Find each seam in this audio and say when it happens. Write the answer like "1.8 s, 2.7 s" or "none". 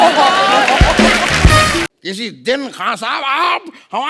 1.9 s